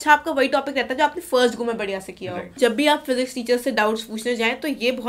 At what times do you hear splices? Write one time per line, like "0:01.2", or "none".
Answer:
0:02.6